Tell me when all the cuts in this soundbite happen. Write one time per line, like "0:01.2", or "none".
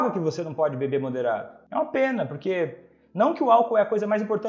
0:01.5